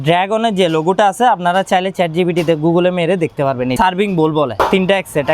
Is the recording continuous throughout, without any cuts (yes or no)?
no